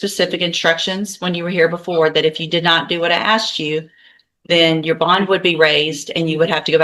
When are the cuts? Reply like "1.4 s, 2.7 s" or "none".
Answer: none